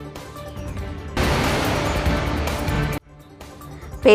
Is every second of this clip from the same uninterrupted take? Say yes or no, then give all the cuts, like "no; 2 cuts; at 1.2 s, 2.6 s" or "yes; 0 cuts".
no; 1 cut; at 0.9 s